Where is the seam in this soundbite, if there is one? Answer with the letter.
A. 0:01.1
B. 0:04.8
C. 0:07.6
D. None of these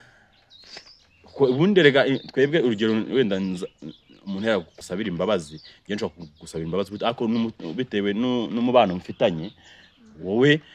B